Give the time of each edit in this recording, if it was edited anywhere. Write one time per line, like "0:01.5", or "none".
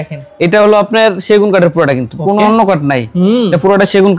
none